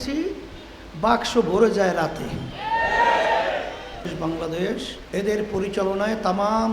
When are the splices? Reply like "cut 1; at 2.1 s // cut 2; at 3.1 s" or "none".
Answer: cut 1; at 4.1 s // cut 2; at 5.0 s